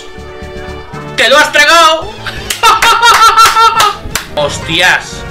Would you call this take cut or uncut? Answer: cut